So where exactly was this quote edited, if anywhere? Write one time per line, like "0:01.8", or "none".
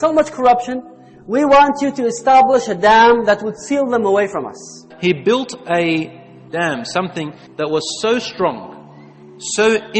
0:04.9
0:06.5